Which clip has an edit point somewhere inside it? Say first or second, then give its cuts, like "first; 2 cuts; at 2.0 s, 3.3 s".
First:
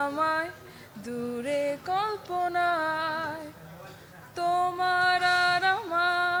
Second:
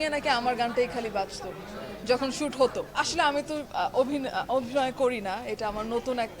second; 1 cut; at 2.9 s